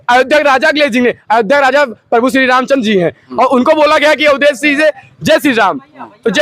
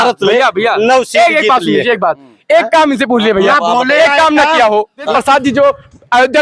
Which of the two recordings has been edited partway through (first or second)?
second